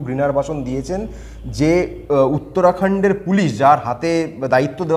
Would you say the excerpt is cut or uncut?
uncut